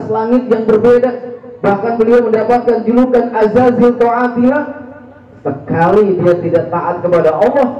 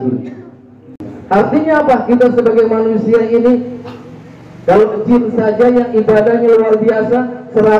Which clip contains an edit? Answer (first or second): second